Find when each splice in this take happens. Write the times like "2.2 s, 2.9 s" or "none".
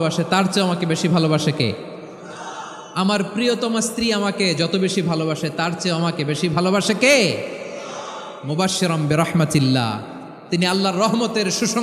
none